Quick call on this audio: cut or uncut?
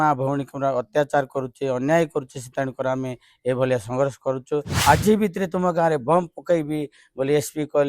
cut